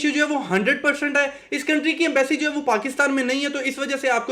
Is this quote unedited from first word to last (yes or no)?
yes